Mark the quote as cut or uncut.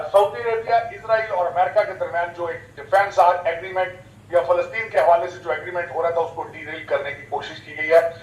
uncut